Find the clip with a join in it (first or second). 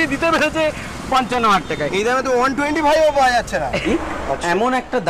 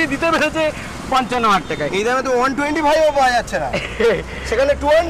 first